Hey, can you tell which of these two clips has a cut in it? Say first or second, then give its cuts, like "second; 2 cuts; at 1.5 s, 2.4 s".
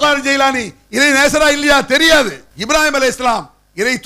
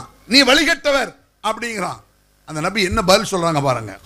first; 1 cut; at 2.5 s